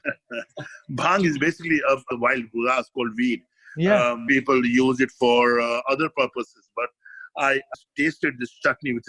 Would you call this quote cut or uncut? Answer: cut